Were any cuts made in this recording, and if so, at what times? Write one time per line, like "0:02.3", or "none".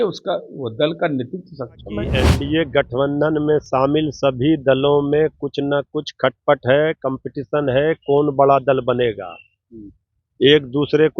0:02.2

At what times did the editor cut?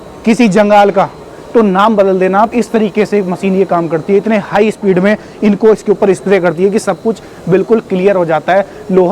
none

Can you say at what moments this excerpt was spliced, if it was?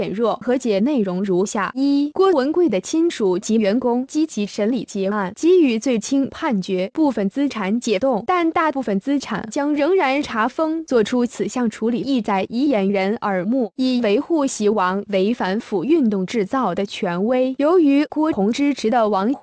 none

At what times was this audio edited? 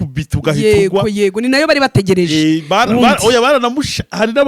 none

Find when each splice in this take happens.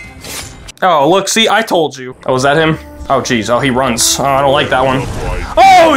0:02.0
0:02.9

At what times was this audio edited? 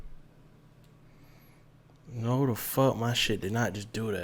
none

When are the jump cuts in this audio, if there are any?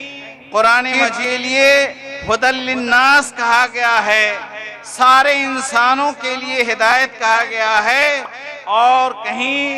0:01.1

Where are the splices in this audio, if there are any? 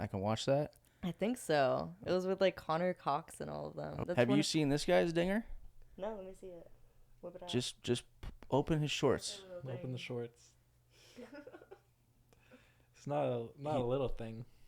0:04.0

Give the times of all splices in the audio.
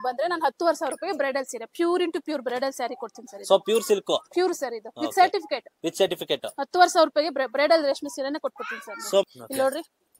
0:09.3

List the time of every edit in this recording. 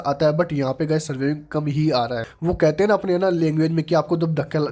0:02.3

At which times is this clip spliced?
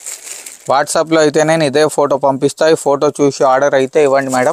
none

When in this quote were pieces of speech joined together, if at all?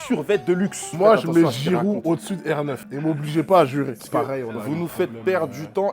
0:00.9
0:04.0

